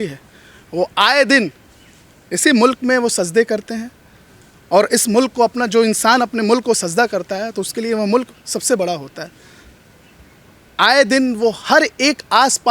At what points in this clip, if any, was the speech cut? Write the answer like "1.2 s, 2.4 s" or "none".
none